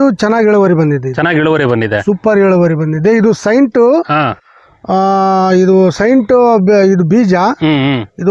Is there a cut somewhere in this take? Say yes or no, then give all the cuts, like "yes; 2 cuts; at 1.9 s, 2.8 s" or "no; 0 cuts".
no; 0 cuts